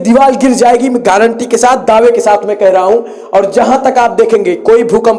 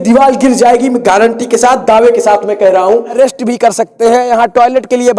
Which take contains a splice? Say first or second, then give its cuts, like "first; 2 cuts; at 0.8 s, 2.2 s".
second; 1 cut; at 3.2 s